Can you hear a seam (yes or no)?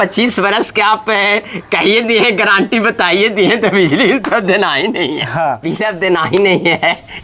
yes